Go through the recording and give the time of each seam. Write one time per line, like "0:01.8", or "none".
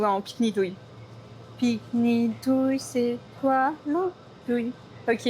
none